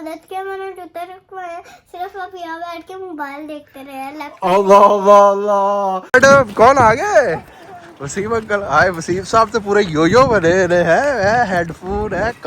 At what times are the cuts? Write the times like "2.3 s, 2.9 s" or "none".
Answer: 6.0 s